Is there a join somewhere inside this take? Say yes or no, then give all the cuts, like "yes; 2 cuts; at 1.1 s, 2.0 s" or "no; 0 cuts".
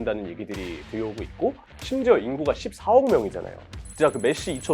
yes; 2 cuts; at 1.6 s, 3.6 s